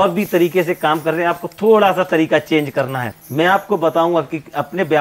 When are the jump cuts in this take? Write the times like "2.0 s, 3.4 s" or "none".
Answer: 3.5 s